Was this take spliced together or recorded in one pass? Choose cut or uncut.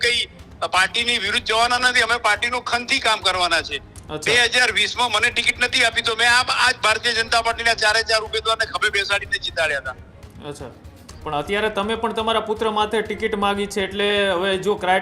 uncut